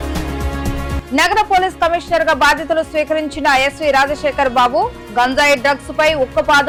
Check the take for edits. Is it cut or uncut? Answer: uncut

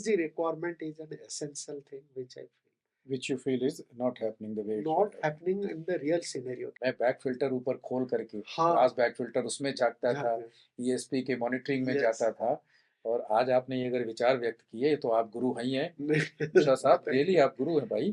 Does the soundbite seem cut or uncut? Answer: cut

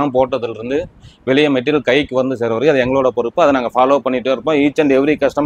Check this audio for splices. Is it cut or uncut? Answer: uncut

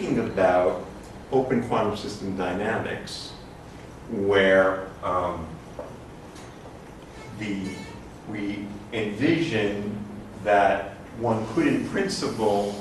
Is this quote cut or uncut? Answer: uncut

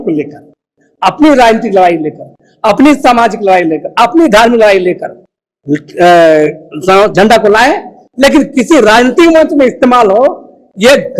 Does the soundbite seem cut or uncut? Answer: uncut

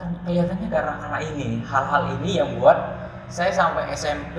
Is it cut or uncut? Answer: uncut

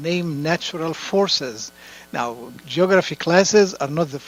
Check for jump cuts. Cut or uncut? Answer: uncut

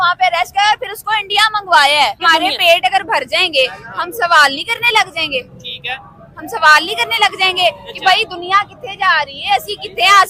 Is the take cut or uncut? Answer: cut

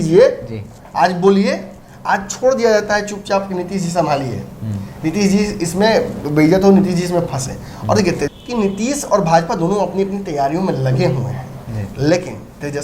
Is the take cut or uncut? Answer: cut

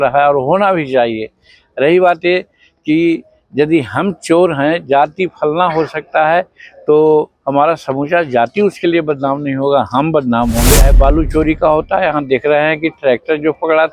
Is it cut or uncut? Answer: cut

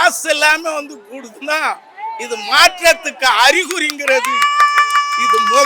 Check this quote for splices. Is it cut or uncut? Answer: uncut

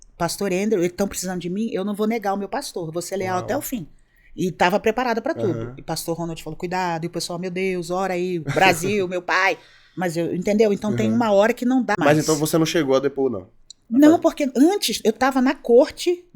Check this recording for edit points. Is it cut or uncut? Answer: cut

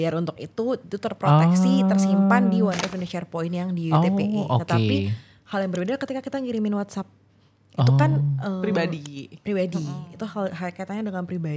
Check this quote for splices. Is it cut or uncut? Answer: uncut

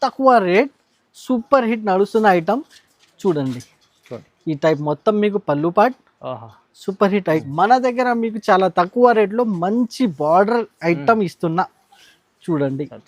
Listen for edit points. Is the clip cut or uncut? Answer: cut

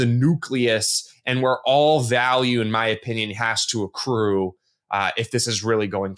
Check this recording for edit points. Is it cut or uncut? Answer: uncut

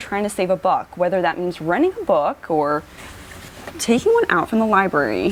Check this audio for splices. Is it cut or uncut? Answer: uncut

